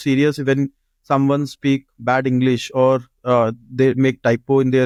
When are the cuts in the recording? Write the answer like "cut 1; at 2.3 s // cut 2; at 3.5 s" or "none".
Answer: none